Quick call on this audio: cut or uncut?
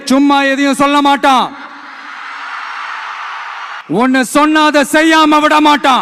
cut